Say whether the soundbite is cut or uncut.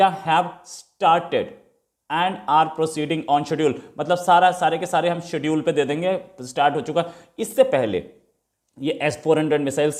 uncut